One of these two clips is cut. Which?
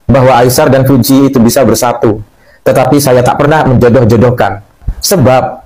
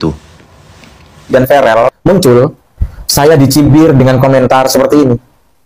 second; 1 cut; at 1.3 s

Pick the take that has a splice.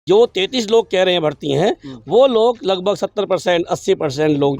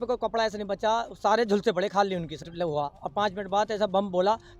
second; 1 cut; at 2.5 s

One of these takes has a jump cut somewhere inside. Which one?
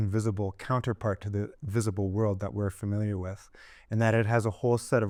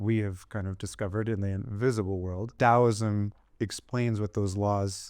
second; 1 cut; at 2.5 s

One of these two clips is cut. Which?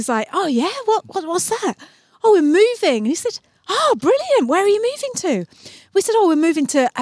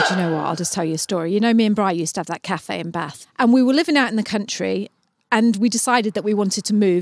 second; 1 cut; at 3.2 s

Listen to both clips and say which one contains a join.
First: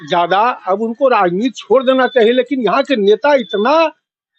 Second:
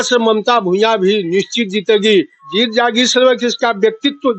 second; 1 cut; at 2.4 s

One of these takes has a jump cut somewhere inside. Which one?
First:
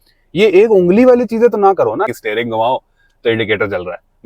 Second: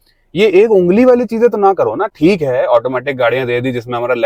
first; 1 cut; at 2.1 s

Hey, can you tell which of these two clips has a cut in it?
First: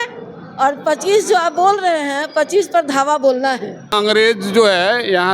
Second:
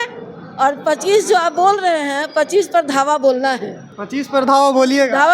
first; 1 cut; at 3.9 s

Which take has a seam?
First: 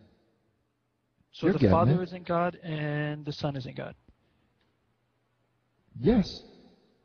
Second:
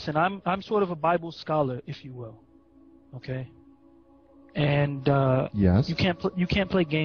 second; 1 cut; at 2.2 s

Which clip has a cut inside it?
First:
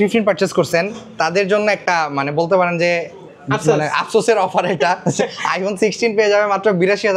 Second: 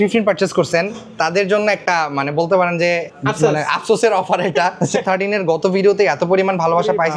second; 2 cuts; at 3.1 s, 5.0 s

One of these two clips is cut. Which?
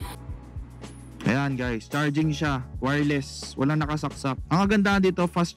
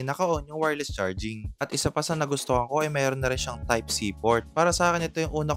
first; 1 cut; at 4.4 s

